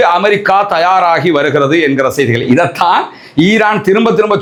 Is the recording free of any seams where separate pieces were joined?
yes; 0 cuts

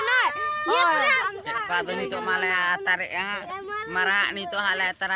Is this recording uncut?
no; 1 cut; at 1.0 s

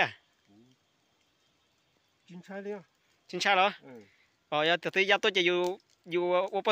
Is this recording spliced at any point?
no; 0 cuts

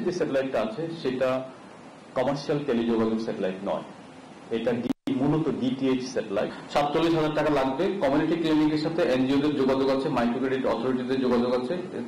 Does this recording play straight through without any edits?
no; 1 cut; at 6.6 s

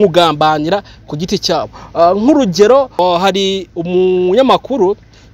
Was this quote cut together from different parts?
yes; 1 cut; at 2.9 s

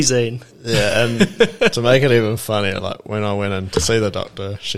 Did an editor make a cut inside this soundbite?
no; 0 cuts

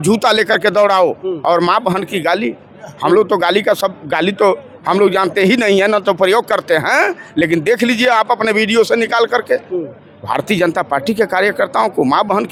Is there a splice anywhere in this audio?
no; 0 cuts

